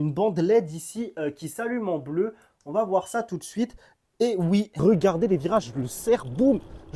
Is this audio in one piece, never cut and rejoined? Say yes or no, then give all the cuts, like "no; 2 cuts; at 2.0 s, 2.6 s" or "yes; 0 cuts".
no; 1 cut; at 4.7 s